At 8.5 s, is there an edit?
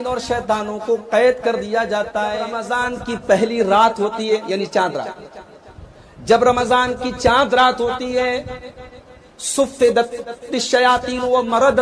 no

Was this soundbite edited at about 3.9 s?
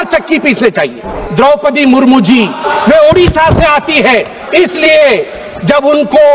no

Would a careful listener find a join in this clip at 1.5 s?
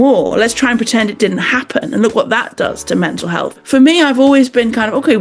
no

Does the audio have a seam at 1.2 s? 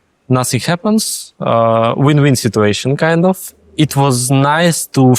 no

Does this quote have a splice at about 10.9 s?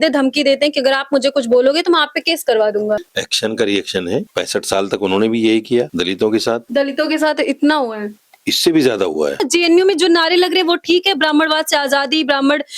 no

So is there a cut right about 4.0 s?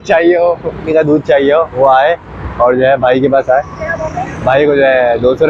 no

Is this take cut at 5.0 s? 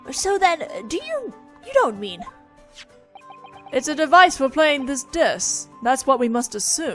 yes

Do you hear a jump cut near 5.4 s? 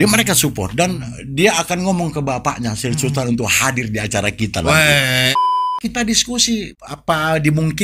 yes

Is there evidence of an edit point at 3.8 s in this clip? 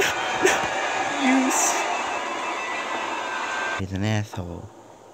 yes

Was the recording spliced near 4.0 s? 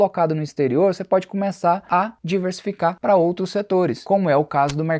yes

